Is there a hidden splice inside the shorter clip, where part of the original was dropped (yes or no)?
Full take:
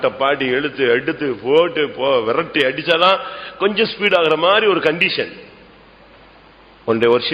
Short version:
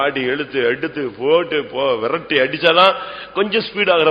no